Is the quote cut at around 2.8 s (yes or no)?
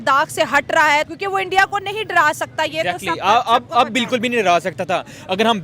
no